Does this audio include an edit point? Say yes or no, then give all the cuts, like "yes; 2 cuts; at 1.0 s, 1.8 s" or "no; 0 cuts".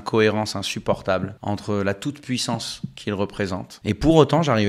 yes; 2 cuts; at 1.3 s, 3.7 s